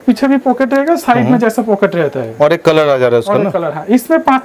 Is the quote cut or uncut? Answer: uncut